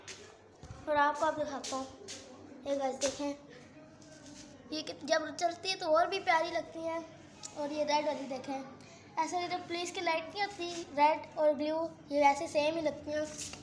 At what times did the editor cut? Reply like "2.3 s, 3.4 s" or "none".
none